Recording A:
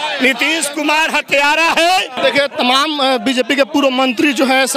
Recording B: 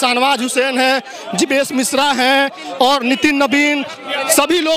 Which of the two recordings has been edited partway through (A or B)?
A